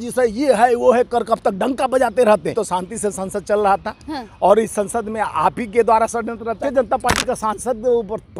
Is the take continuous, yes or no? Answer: no